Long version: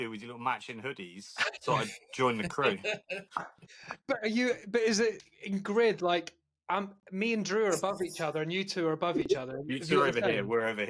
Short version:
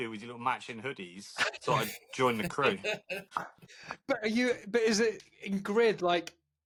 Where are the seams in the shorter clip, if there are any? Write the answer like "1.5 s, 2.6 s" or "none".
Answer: none